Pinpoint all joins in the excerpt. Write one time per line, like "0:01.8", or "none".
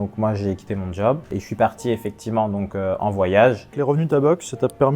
0:01.3
0:03.8

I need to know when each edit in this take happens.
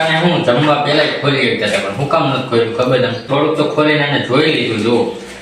0:03.3

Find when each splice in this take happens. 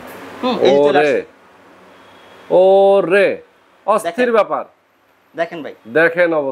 none

